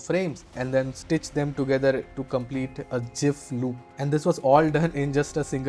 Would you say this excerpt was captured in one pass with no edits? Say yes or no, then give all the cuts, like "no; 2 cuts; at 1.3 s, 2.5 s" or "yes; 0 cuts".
yes; 0 cuts